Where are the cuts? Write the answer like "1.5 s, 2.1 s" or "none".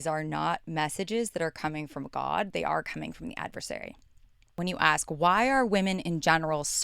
4.6 s